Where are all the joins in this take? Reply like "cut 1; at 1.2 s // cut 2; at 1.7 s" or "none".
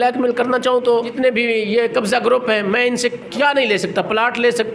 cut 1; at 1.1 s